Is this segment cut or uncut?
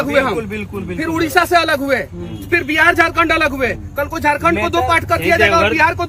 uncut